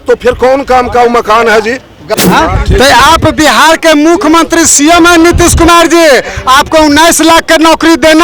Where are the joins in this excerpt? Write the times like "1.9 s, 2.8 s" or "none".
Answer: 2.1 s